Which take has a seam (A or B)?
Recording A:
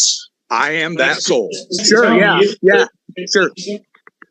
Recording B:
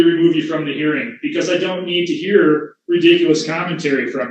A